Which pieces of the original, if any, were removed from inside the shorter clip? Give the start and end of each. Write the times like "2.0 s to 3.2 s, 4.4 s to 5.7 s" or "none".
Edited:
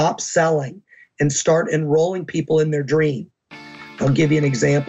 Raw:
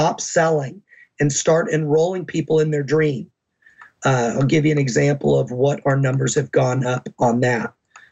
4.0 s to 4.3 s